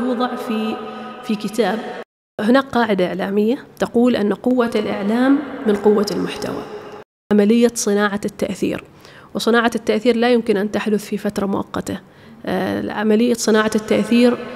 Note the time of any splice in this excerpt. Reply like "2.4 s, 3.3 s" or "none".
2.4 s, 7.1 s

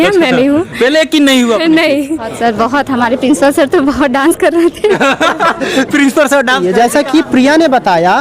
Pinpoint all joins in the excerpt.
2.3 s, 6.6 s

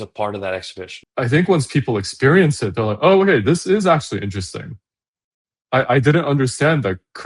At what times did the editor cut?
1.0 s

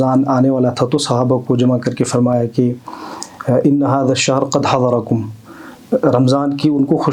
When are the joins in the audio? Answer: none

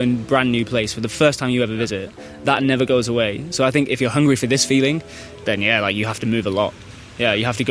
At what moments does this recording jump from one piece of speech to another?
1.1 s, 3.9 s

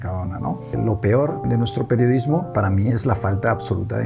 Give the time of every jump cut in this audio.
0.7 s, 1.4 s, 2.5 s

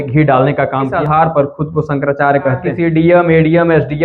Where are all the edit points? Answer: 0.9 s, 2.6 s

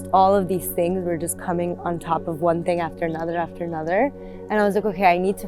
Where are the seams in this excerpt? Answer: 4.3 s

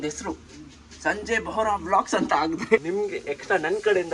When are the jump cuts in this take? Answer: 2.8 s

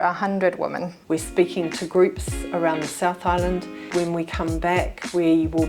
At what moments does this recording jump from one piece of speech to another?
1.0 s, 3.9 s

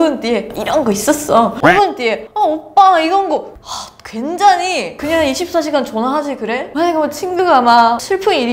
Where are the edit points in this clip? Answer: 6.6 s

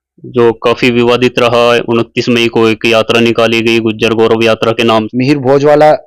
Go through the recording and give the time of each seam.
5.1 s

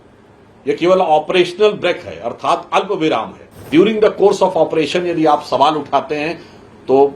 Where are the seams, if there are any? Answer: 3.7 s

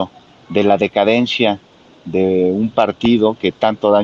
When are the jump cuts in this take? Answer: none

